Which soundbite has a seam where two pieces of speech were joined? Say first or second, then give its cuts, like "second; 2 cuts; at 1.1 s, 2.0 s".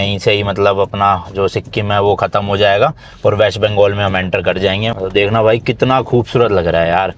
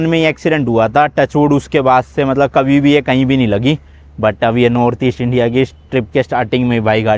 first; 1 cut; at 5.0 s